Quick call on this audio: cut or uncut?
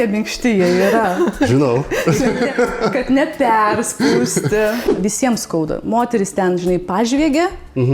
cut